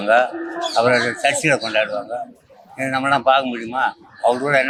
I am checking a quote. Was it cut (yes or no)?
no